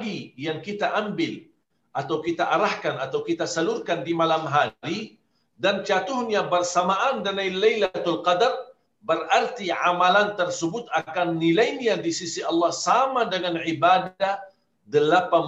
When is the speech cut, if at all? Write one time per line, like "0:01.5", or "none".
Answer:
none